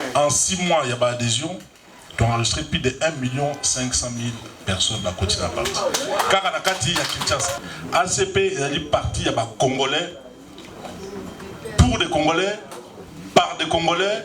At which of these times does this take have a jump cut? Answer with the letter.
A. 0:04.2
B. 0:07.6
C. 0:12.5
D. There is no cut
B